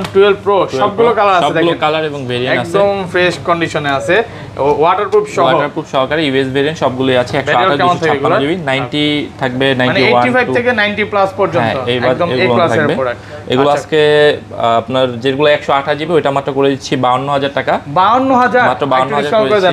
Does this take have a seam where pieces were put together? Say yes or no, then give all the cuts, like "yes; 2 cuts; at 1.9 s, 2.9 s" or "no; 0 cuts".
no; 0 cuts